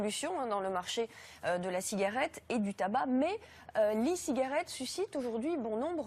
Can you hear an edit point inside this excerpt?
no; 0 cuts

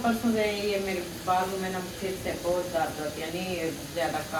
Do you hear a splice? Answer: no; 0 cuts

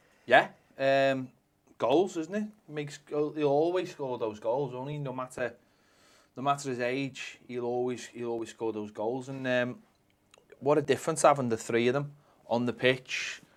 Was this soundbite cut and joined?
no; 0 cuts

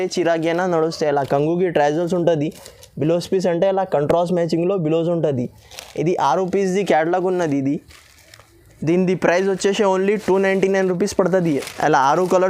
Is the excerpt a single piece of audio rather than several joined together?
yes; 0 cuts

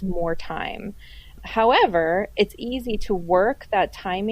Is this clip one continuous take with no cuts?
no; 1 cut; at 1.4 s

